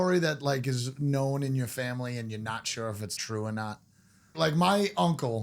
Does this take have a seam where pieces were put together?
yes; 2 cuts; at 3.1 s, 4.3 s

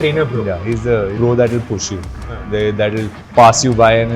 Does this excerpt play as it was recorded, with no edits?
no; 2 cuts; at 1.2 s, 3.2 s

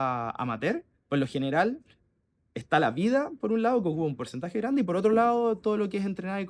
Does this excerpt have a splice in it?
no; 0 cuts

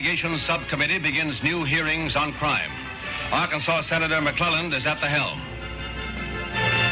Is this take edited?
no; 0 cuts

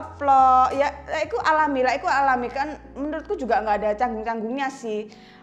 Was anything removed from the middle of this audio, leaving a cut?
no; 0 cuts

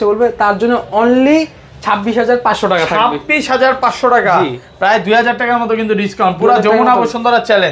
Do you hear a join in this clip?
no; 0 cuts

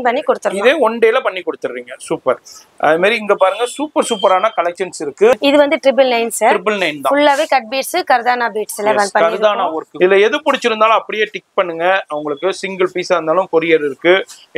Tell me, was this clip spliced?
yes; 2 cuts; at 5.3 s, 9.8 s

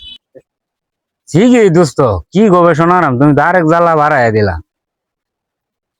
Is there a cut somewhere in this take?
no; 0 cuts

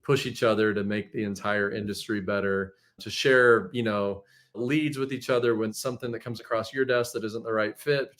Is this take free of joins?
no; 3 cuts; at 3.0 s, 4.6 s, 5.7 s

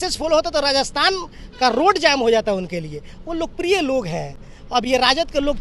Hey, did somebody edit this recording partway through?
no; 0 cuts

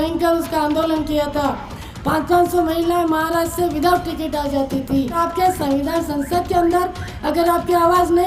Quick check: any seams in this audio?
yes; 1 cut; at 5.2 s

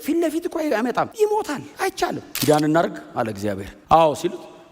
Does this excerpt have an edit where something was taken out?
yes; 3 cuts; at 1.1 s, 2.3 s, 3.7 s

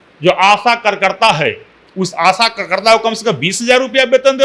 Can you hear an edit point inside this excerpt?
no; 0 cuts

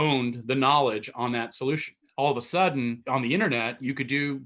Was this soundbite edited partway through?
yes; 2 cuts; at 2.0 s, 3.0 s

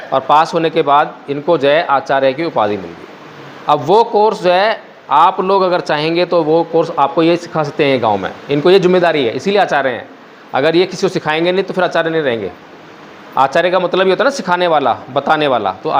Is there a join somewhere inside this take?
no; 0 cuts

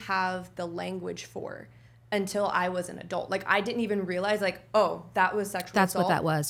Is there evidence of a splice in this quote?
no; 0 cuts

